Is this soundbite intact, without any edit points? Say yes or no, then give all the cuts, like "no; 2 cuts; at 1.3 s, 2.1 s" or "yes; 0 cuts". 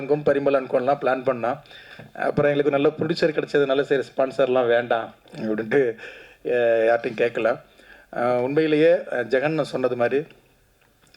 yes; 0 cuts